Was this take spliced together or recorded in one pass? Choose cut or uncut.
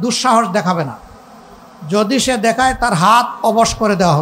uncut